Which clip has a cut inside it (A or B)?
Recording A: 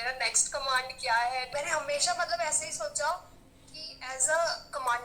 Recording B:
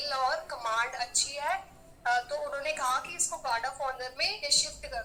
A